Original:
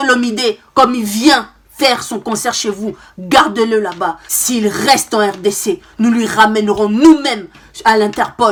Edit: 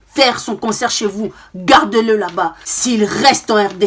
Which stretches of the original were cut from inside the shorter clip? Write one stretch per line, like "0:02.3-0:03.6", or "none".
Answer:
none